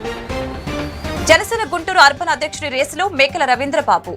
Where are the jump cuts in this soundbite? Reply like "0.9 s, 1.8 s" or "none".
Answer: none